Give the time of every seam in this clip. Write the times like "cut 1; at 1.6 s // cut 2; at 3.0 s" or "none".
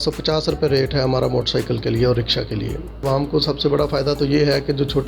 cut 1; at 3.0 s